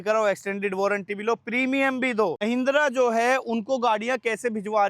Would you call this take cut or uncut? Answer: cut